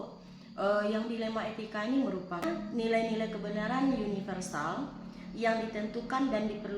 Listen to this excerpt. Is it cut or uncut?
cut